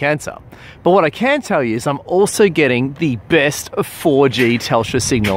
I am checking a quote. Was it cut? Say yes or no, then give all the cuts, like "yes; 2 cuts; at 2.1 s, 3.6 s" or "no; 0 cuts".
yes; 1 cut; at 2.3 s